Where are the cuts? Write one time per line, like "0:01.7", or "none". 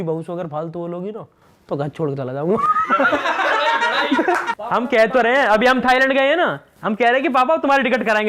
0:04.5